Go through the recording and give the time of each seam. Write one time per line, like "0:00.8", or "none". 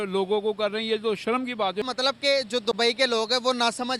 0:01.8